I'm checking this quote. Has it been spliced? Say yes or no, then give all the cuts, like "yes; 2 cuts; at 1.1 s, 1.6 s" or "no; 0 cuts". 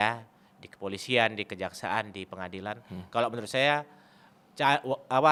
no; 0 cuts